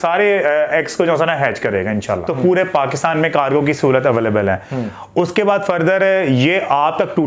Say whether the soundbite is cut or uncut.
cut